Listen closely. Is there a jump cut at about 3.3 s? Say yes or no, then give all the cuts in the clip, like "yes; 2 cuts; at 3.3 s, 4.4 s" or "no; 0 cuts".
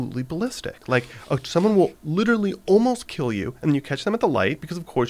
no; 1 cut; at 1.9 s